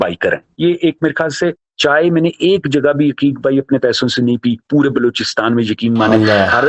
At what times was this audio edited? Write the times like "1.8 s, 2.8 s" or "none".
1.7 s